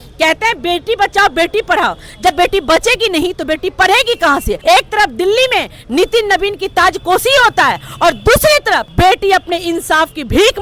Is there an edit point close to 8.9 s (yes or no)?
yes